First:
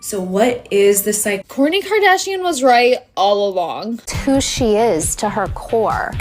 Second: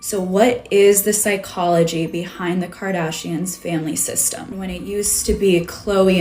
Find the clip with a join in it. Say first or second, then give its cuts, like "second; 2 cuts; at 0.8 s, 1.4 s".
first; 1 cut; at 1.4 s